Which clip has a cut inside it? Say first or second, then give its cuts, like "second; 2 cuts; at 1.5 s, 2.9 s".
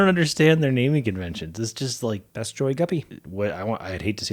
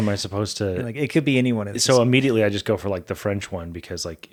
first; 2 cuts; at 2.3 s, 3.2 s